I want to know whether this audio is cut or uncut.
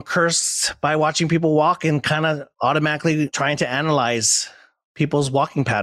cut